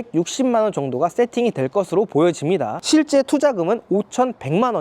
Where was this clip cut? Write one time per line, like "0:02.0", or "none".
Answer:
0:02.8